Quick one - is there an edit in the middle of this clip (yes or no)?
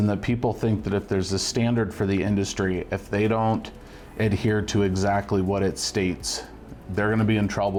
no